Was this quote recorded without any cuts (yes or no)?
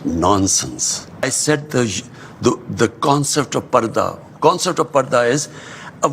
no